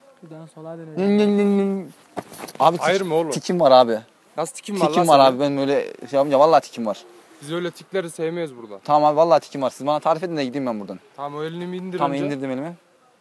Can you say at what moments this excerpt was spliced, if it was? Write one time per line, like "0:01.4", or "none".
none